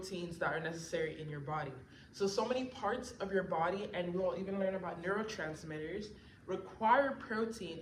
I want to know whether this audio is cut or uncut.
uncut